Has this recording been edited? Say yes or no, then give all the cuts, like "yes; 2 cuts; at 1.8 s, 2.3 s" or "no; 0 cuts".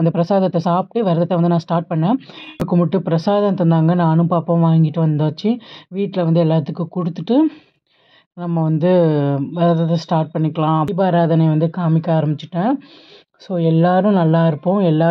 yes; 2 cuts; at 2.6 s, 10.9 s